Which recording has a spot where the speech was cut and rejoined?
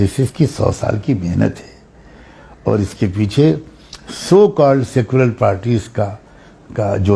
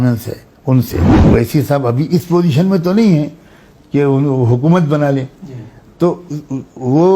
second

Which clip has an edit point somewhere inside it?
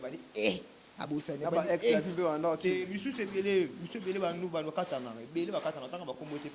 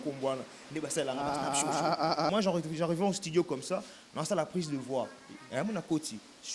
second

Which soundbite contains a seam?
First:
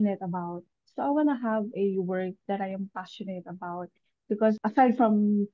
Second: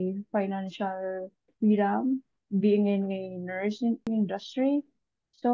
second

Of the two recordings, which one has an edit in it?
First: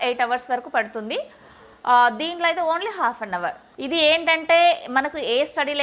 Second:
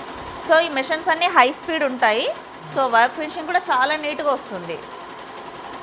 first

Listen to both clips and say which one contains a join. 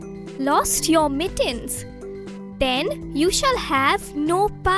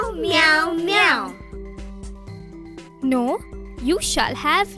second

